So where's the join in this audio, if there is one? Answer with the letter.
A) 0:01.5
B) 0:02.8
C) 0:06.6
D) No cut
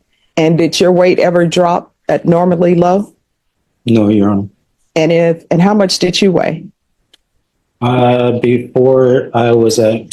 D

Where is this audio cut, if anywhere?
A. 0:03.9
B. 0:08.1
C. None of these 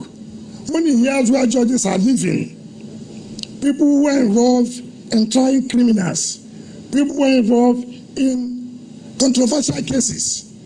C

